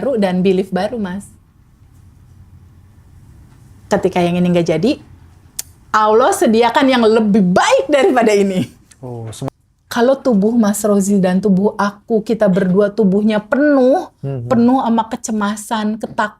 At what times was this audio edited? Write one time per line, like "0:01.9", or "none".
0:09.5